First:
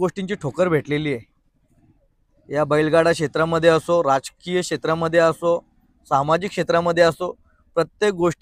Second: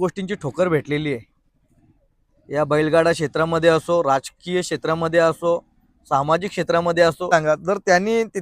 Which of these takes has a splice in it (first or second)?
second